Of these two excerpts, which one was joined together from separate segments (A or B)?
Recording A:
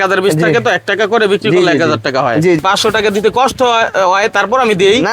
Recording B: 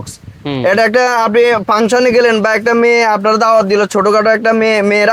A